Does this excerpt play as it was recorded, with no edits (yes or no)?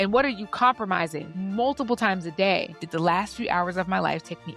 no